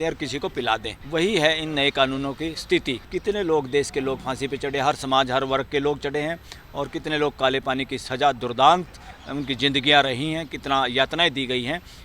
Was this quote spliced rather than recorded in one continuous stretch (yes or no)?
yes